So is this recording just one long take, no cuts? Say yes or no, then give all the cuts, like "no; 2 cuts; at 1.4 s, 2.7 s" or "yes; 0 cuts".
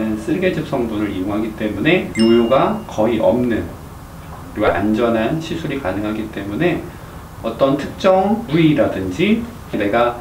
yes; 0 cuts